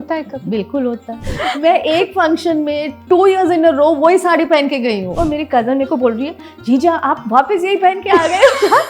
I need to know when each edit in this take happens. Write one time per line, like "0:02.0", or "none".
0:01.3
0:05.1